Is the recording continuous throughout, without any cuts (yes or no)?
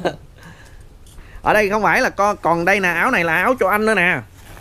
yes